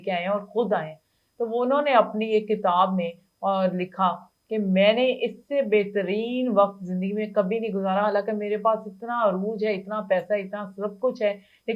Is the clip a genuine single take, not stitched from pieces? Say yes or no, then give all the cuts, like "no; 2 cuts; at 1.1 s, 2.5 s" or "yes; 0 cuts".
yes; 0 cuts